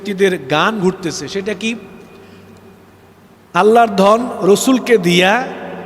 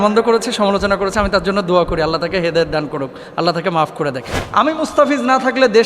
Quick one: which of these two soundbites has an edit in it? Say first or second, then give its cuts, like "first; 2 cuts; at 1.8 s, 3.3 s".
second; 1 cut; at 4.3 s